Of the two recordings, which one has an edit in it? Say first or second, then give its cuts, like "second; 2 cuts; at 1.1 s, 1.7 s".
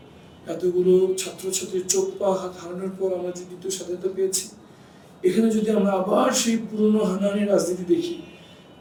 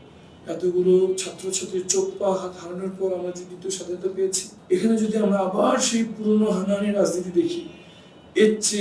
second; 1 cut; at 4.5 s